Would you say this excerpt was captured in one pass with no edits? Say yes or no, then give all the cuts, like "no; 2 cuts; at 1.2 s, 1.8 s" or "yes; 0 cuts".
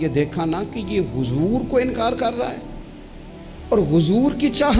yes; 0 cuts